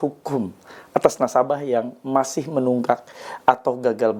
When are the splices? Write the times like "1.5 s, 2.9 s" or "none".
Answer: none